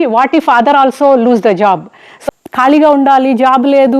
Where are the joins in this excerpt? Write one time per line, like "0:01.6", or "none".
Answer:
0:02.2